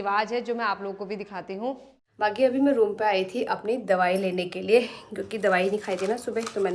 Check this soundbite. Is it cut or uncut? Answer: cut